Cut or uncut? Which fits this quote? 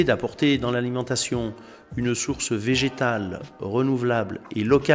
uncut